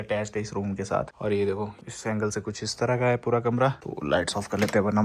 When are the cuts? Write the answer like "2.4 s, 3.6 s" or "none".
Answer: 1.1 s, 1.8 s, 3.8 s